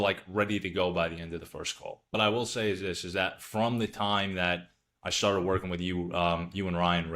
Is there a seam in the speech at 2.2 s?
yes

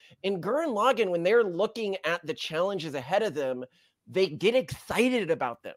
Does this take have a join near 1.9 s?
no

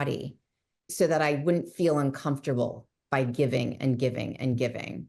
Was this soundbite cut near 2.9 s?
no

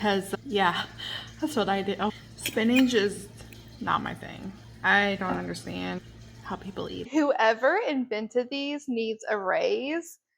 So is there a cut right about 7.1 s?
yes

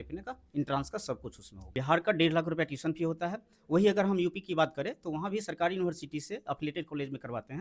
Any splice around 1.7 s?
yes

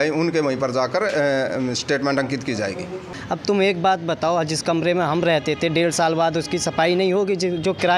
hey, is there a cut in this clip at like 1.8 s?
no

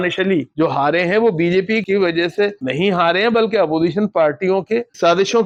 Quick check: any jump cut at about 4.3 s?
no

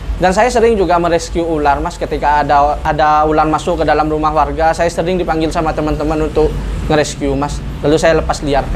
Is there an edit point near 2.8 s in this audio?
yes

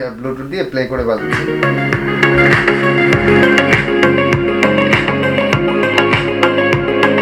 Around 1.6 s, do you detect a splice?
no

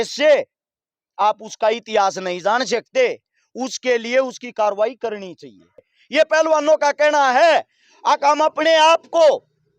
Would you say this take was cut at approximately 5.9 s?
yes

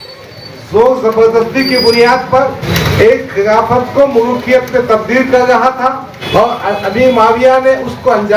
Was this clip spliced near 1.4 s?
no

